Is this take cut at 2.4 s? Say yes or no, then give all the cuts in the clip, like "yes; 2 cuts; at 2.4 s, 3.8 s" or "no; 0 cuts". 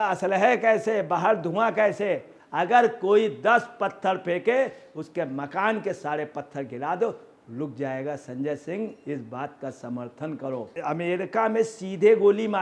yes; 2 cuts; at 2.4 s, 10.8 s